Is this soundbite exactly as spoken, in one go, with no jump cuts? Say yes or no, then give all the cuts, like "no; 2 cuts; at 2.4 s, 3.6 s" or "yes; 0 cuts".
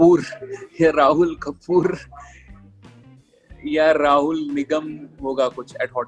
yes; 0 cuts